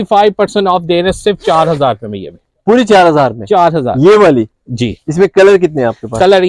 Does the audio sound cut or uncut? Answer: uncut